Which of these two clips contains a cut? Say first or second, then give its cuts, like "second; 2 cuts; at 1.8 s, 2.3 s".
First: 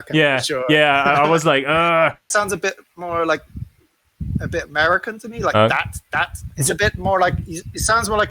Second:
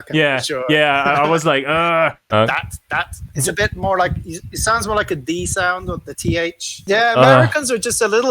second; 1 cut; at 2.3 s